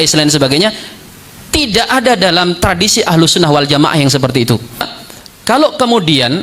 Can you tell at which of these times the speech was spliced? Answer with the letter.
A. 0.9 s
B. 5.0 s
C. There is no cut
B